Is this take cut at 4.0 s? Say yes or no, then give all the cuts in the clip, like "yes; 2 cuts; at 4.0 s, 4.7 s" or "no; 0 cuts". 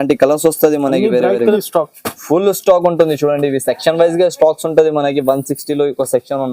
no; 1 cut; at 1.4 s